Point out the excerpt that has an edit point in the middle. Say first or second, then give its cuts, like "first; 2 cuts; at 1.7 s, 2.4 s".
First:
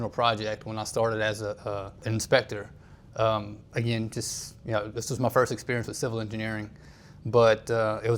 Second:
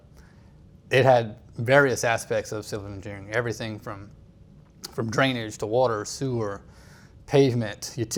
first; 1 cut; at 2.1 s